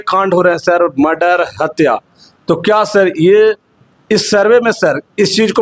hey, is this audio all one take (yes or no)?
yes